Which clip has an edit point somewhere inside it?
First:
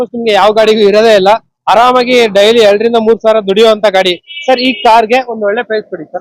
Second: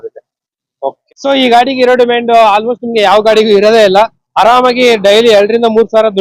second; 1 cut; at 1.0 s

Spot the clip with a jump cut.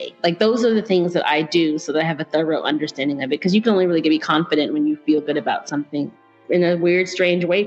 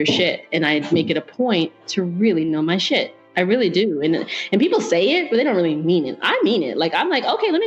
first; 1 cut; at 6.4 s

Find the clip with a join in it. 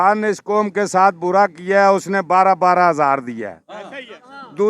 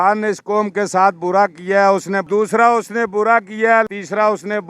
second; 2 cuts; at 2.2 s, 3.9 s

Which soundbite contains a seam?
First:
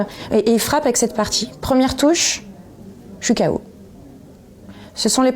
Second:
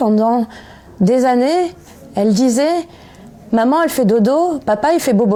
first; 1 cut; at 1.5 s

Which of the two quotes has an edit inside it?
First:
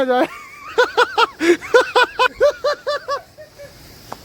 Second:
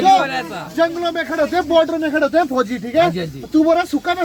first; 1 cut; at 2.3 s

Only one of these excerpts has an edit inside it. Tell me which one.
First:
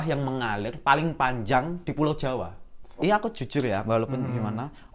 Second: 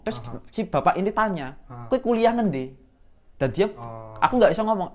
first; 1 cut; at 2.9 s

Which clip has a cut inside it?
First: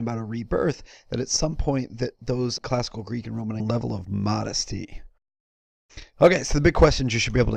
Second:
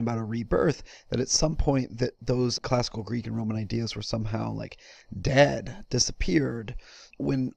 second; 1 cut; at 3.6 s

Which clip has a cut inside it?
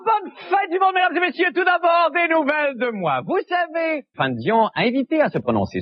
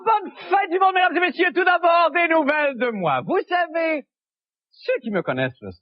second; 1 cut; at 4.2 s

